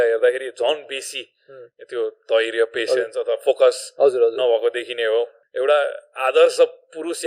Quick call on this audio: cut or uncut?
cut